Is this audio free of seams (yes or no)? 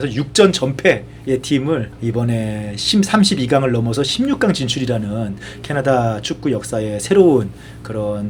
yes